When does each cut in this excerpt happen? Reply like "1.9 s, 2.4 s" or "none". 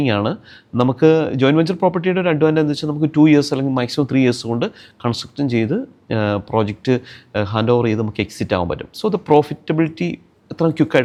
none